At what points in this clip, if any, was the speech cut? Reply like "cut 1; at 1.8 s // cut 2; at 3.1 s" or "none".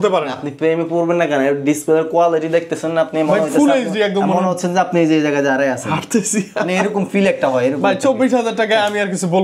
none